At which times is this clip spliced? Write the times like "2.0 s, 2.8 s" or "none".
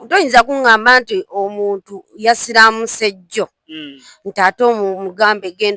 none